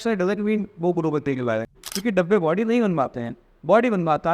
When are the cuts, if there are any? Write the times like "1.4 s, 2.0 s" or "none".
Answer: 1.8 s